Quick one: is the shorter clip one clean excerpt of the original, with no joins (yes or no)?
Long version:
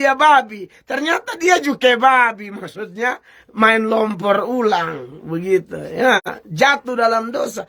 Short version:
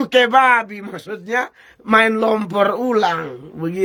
yes